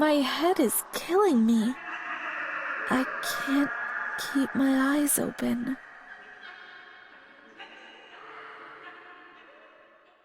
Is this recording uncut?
no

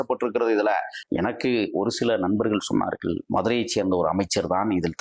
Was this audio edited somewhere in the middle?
yes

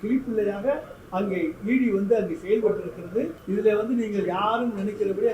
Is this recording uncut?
no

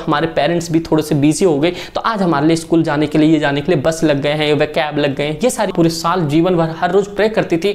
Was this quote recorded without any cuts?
no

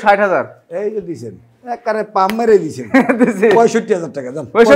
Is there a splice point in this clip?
no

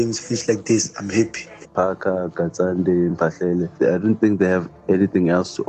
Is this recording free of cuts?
no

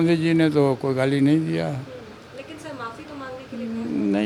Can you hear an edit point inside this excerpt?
no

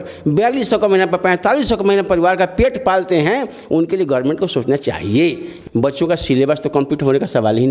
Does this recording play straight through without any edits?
no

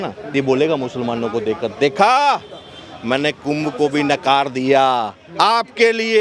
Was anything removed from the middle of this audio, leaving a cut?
no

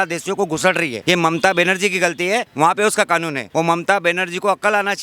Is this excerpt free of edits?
no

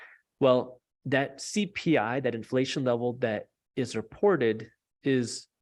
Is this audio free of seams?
yes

